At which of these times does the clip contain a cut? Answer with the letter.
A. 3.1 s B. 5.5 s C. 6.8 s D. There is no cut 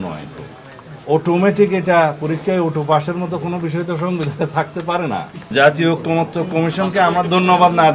B